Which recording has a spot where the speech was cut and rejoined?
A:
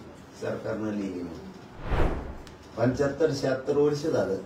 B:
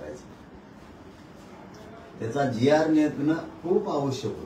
A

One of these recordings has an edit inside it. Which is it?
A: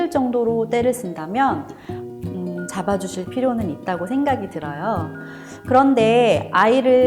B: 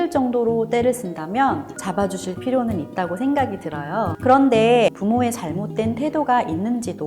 B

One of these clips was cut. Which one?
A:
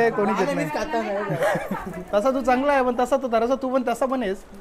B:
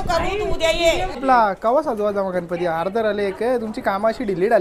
B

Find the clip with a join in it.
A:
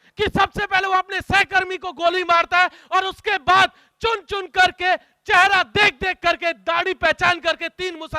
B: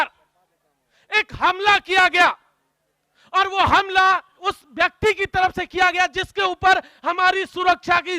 B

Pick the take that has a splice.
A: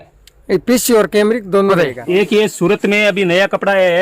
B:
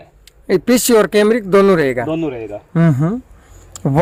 A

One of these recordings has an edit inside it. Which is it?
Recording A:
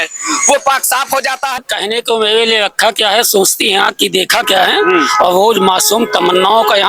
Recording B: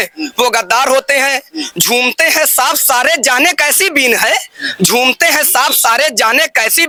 A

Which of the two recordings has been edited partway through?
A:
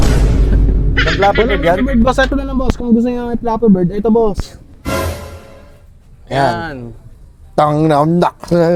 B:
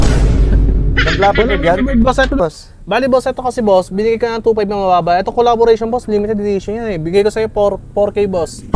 B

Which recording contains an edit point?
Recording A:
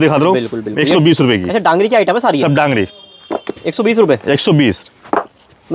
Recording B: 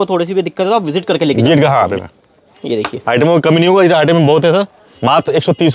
B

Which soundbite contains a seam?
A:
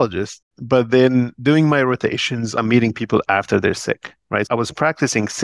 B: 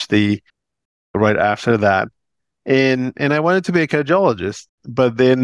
A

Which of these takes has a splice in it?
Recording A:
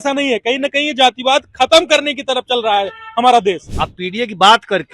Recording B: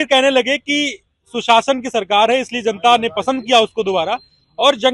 A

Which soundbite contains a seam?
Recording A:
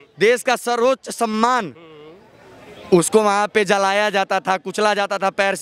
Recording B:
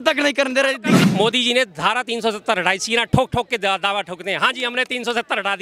B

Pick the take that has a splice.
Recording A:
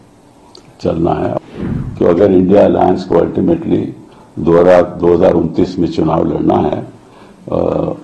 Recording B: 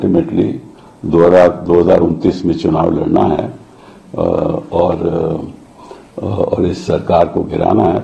A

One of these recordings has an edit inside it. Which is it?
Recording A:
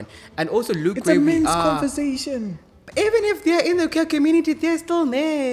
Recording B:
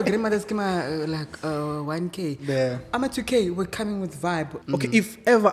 B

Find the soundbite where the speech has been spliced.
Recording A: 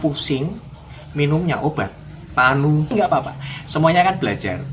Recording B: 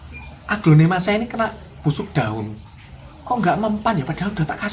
A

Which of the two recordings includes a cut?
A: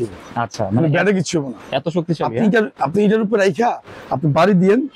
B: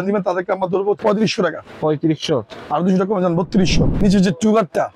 B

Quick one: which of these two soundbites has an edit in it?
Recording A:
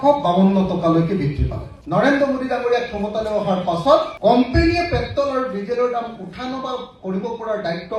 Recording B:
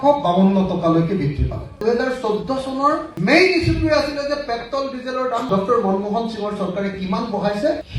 A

